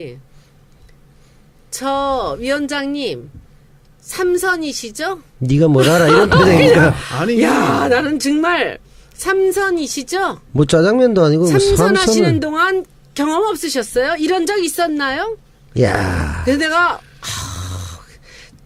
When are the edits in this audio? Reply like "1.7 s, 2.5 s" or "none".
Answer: none